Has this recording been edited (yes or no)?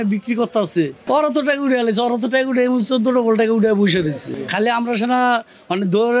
yes